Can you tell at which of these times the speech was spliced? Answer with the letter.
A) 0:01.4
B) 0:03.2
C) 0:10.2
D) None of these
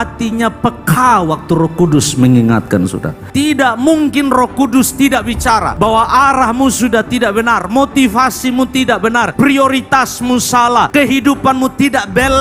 B